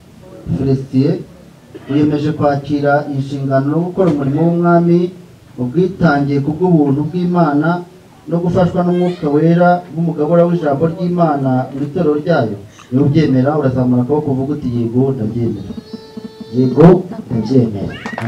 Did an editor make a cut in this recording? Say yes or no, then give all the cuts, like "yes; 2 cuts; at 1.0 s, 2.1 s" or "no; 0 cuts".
no; 0 cuts